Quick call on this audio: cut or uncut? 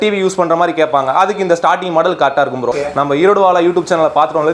cut